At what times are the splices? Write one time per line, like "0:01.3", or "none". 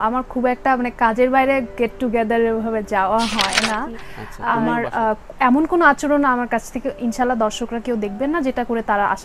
0:04.0